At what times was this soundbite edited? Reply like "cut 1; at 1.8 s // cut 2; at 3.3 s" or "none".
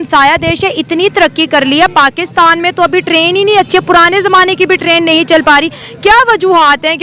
none